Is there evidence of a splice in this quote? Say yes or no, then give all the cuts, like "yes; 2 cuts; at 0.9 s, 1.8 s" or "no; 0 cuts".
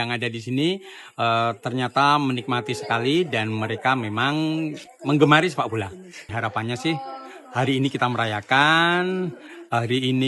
yes; 1 cut; at 6.2 s